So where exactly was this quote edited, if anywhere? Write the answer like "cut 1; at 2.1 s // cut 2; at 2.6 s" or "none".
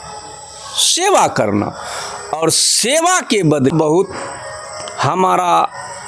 cut 1; at 3.7 s